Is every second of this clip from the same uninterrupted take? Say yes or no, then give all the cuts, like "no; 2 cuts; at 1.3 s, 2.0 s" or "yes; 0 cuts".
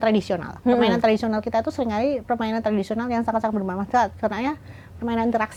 yes; 0 cuts